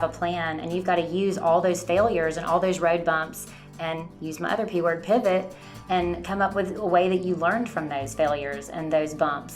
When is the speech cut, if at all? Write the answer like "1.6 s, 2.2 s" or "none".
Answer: none